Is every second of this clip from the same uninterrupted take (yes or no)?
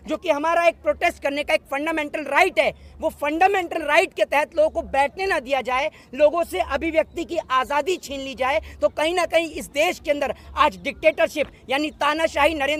yes